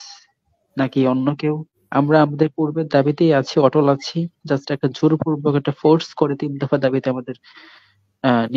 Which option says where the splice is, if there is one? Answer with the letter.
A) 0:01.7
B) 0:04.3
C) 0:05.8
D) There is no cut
A